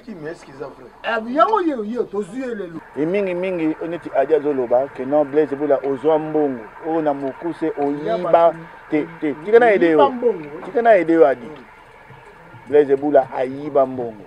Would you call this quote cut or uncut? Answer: cut